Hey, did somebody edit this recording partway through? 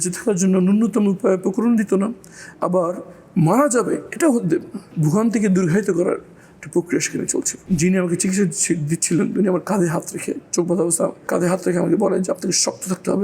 yes; 3 cuts; at 4.8 s, 7.6 s, 11.2 s

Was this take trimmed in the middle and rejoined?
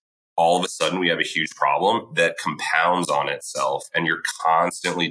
no; 0 cuts

